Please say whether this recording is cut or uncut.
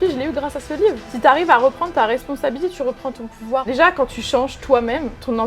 cut